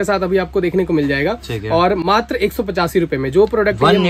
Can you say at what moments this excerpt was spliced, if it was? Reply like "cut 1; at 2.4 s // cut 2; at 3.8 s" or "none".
none